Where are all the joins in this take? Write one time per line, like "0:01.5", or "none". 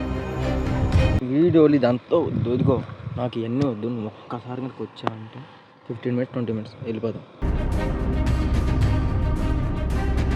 0:01.2